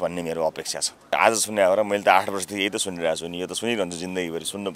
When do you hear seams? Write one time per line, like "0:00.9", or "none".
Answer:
0:01.1